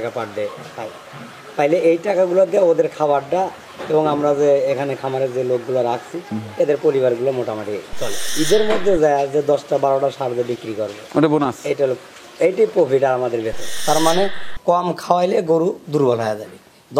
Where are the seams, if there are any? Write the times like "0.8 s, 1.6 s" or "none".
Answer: 8.3 s, 13.7 s